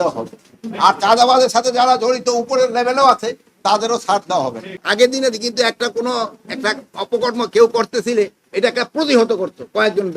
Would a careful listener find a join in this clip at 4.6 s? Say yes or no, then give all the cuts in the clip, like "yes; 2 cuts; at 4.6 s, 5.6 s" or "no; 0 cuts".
yes; 1 cut; at 4.6 s